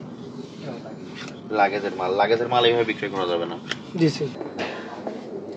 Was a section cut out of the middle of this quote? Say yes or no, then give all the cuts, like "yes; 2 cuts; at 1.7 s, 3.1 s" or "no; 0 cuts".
yes; 1 cut; at 4.2 s